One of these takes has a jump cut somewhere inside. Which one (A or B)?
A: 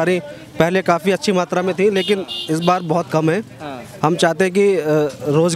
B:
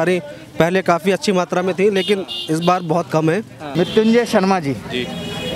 B